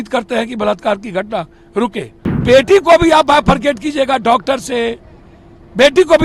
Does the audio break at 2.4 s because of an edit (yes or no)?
yes